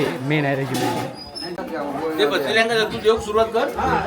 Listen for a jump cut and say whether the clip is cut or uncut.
cut